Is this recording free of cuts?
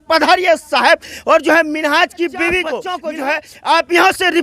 no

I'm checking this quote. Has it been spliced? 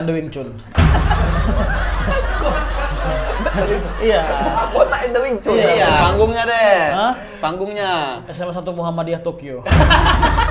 yes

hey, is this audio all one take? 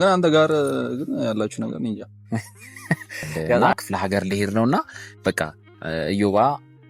no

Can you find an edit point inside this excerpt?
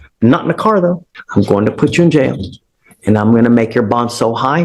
yes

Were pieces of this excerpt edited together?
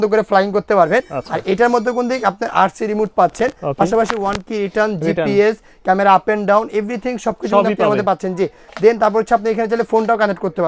no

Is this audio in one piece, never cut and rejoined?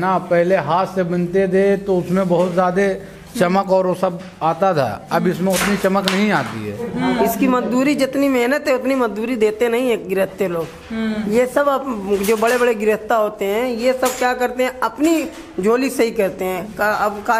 no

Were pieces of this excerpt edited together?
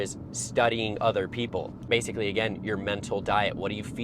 yes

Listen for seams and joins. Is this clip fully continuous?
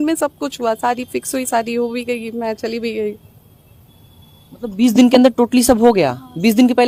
yes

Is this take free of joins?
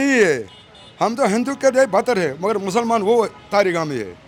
yes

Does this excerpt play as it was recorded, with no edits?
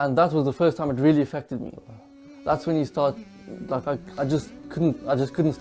yes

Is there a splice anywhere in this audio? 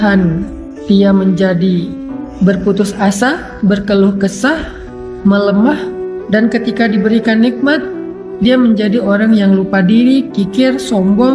no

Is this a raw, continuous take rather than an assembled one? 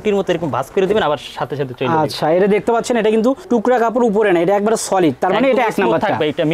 yes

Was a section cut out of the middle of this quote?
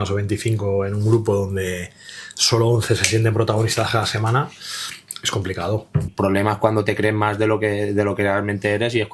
yes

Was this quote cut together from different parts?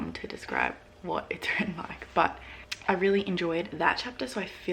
no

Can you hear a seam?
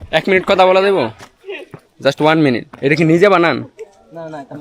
yes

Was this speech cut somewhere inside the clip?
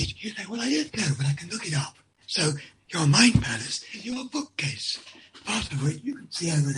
no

